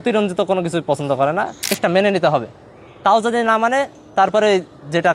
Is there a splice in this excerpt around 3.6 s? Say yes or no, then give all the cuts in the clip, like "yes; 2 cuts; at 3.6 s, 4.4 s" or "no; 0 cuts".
no; 1 cut; at 1.8 s